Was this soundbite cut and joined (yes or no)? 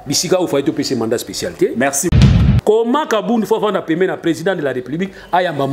yes